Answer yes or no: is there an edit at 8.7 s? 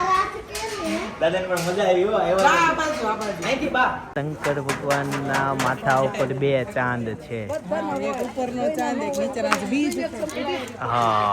no